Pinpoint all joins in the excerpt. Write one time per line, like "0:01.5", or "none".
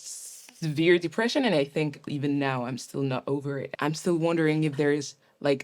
0:02.1
0:03.7